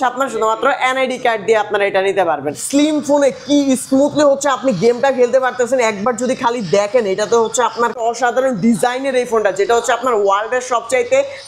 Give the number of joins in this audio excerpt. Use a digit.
2